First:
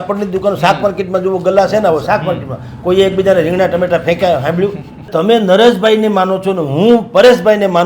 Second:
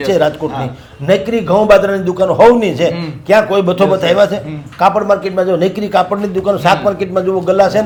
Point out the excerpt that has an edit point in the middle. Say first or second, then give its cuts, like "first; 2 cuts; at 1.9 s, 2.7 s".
first; 1 cut; at 5.1 s